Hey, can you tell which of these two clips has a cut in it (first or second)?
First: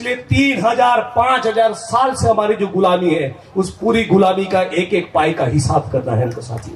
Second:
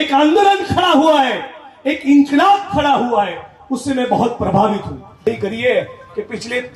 second